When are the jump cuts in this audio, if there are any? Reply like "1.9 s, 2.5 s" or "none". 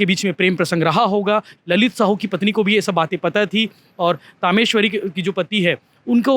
1.6 s